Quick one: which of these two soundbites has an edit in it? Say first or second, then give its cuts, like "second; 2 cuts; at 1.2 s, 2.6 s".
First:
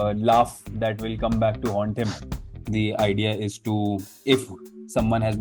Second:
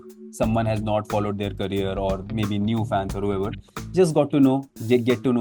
first; 1 cut; at 2.6 s